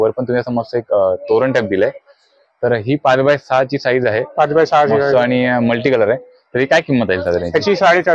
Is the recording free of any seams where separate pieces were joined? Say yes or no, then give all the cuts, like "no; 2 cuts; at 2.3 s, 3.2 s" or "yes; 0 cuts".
yes; 0 cuts